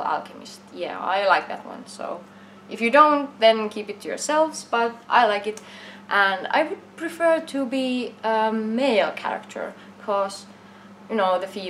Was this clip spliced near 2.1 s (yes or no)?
yes